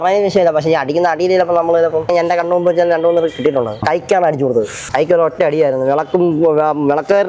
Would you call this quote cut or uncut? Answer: cut